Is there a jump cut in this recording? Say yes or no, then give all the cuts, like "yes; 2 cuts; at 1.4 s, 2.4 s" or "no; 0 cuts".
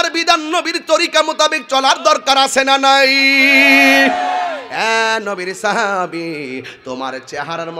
yes; 1 cut; at 4.7 s